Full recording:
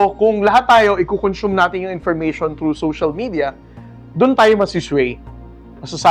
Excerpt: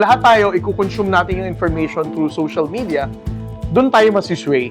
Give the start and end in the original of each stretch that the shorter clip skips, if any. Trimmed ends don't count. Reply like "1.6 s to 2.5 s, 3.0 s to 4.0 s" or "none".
none